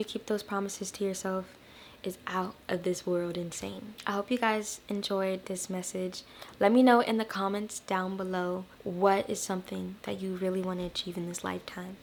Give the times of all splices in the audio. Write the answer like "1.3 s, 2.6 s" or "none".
none

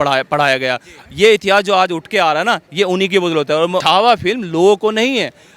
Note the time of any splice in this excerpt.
3.8 s

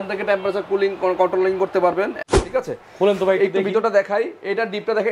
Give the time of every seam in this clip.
2.2 s

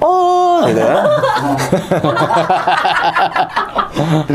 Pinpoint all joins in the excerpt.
none

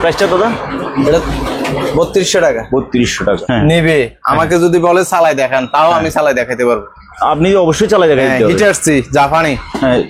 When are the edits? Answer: 3.4 s

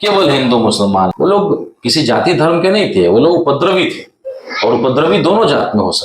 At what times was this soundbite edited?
1.1 s

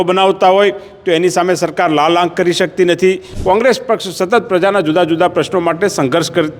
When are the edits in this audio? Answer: 3.3 s

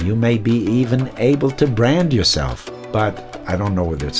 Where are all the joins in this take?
2.6 s, 3.3 s

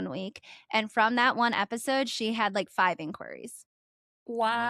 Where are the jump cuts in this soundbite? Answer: none

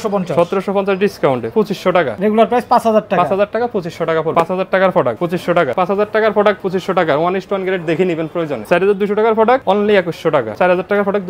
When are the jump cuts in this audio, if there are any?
2.0 s, 4.3 s, 5.7 s, 6.6 s, 8.6 s, 10.5 s

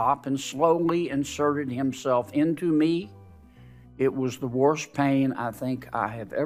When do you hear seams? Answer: none

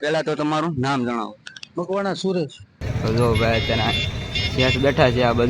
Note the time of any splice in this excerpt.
2.8 s

